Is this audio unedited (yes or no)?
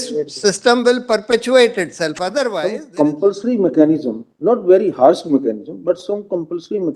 no